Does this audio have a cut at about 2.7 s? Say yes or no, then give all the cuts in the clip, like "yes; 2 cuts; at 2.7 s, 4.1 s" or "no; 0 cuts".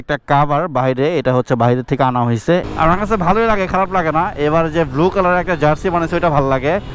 yes; 1 cut; at 2.7 s